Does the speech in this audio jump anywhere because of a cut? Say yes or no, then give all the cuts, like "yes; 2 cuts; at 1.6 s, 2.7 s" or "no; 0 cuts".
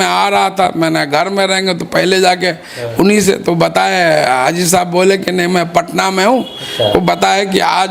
no; 0 cuts